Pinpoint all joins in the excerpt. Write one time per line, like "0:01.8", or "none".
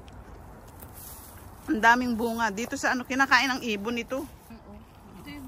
0:04.5